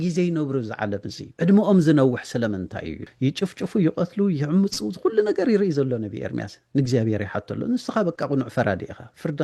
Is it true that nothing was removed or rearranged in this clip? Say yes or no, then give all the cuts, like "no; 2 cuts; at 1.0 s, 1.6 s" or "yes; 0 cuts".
no; 2 cuts; at 1.2 s, 3.0 s